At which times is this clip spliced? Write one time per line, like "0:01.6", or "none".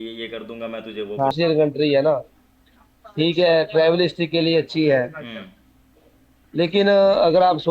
0:01.3